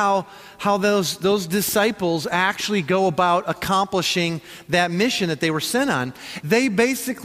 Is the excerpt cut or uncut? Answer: cut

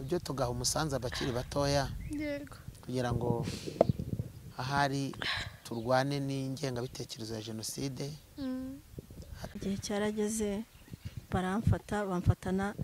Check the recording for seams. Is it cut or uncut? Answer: cut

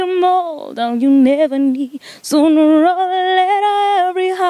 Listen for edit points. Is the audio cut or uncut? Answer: uncut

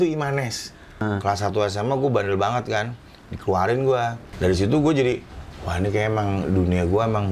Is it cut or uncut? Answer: cut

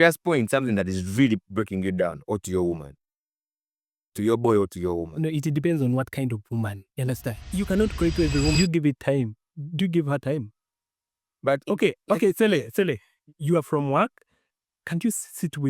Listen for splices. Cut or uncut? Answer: cut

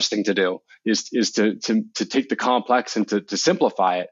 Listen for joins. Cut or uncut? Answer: uncut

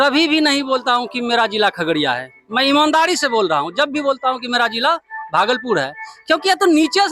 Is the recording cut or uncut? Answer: uncut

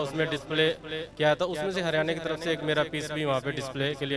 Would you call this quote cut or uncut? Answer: uncut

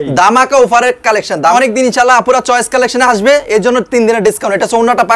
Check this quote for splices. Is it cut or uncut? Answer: cut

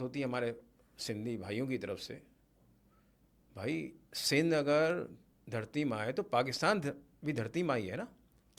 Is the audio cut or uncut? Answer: uncut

